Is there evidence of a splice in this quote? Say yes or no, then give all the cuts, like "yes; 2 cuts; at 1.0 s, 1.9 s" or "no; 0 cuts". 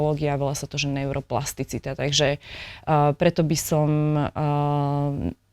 no; 0 cuts